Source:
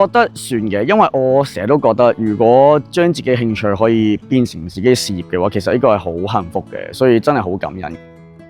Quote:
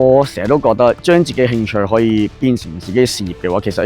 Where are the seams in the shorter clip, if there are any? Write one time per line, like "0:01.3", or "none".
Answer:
0:01.0